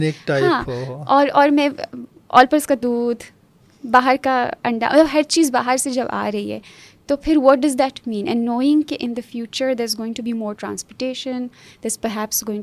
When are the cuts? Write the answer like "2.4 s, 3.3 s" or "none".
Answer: none

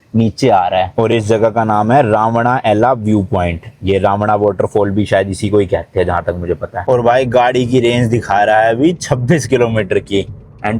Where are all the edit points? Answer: 0.9 s, 6.8 s

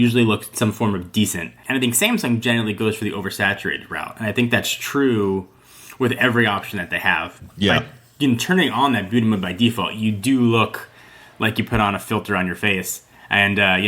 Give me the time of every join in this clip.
1.6 s, 7.4 s

